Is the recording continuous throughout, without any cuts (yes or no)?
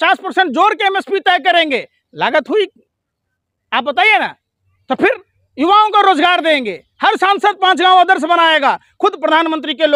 yes